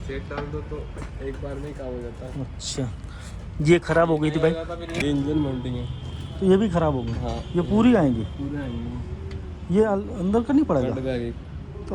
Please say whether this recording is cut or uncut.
cut